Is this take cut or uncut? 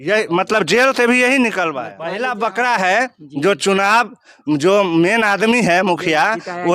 cut